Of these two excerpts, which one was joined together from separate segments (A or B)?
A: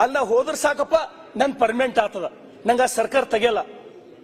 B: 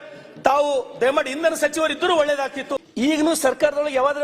B